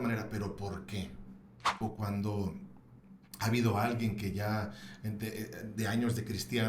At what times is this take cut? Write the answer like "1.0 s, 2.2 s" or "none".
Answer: 1.8 s